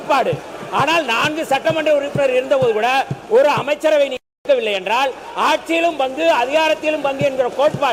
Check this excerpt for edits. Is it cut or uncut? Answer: uncut